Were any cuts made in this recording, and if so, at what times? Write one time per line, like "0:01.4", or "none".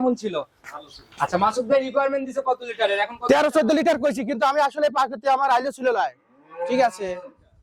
none